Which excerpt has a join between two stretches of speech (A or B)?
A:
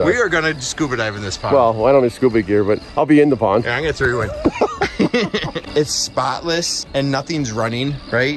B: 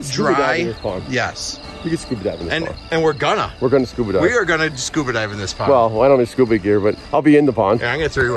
A